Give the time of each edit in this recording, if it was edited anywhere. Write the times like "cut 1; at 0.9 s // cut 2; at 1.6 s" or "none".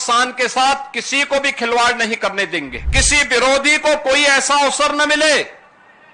cut 1; at 2.8 s